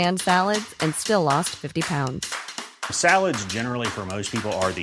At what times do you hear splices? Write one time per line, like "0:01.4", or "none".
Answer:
none

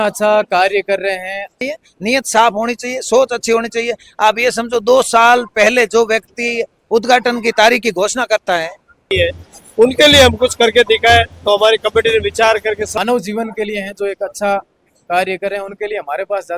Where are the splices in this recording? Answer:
0:01.6
0:09.1
0:12.9

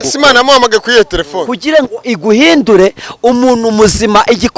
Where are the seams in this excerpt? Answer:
0:01.5

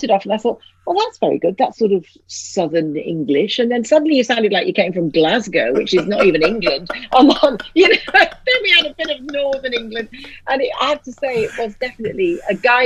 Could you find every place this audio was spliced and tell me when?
none

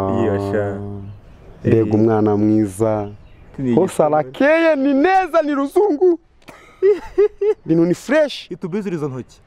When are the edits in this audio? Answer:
none

